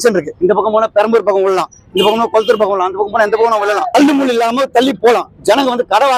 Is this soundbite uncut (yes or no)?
yes